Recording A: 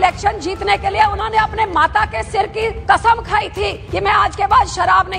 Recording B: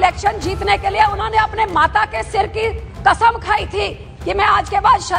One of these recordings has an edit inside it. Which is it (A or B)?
A